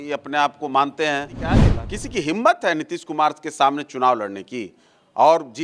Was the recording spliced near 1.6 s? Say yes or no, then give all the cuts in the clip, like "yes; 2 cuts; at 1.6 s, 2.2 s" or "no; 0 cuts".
yes; 1 cut; at 1.6 s